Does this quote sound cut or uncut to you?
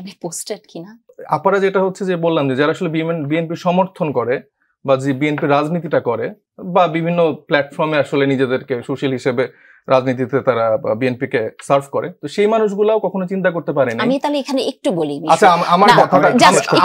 cut